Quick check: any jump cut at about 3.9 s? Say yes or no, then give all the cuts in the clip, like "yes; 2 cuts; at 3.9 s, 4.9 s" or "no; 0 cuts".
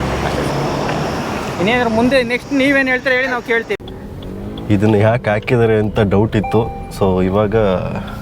yes; 1 cut; at 3.9 s